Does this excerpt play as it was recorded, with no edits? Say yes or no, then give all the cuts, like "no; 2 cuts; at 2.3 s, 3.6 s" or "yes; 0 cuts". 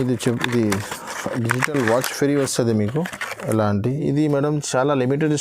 no; 1 cut; at 4.0 s